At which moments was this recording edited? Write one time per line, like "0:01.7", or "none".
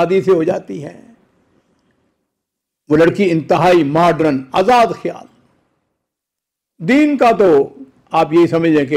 none